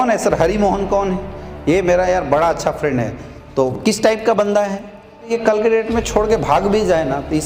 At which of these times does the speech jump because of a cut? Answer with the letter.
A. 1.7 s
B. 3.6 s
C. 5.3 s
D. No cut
C